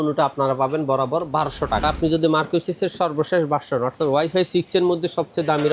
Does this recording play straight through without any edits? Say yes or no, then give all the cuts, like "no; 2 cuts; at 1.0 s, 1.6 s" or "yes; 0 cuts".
no; 1 cut; at 1.8 s